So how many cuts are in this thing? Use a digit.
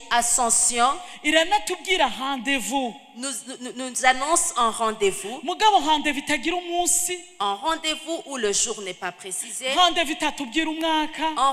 0